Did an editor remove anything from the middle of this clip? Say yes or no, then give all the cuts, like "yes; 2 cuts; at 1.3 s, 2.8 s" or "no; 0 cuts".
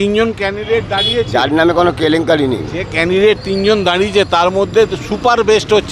no; 0 cuts